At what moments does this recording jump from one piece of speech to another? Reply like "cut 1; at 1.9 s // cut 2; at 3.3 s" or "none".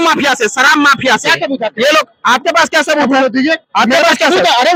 none